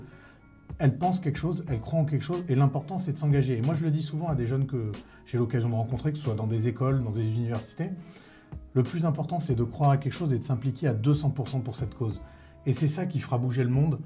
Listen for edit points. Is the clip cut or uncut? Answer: uncut